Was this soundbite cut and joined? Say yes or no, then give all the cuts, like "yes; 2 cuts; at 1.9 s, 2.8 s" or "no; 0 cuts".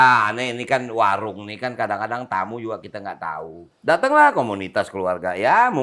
yes; 1 cut; at 3.6 s